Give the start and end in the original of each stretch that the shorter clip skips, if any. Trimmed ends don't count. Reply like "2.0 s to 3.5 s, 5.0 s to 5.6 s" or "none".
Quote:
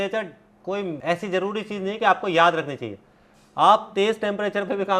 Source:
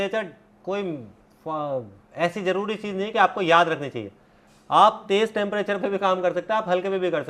1.0 s to 2.1 s